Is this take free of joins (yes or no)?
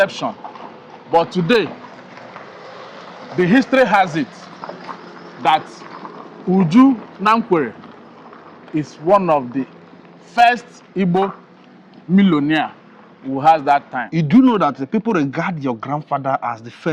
no